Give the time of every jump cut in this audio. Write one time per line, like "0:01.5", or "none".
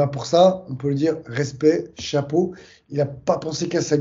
none